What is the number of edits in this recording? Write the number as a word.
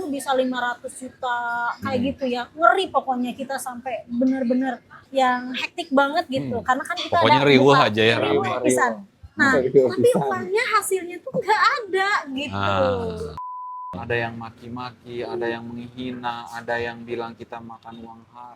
one